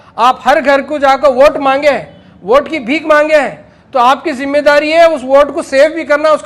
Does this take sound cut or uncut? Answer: uncut